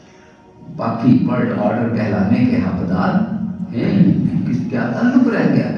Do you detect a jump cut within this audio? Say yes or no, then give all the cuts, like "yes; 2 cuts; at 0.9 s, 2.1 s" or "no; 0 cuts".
yes; 1 cut; at 4.6 s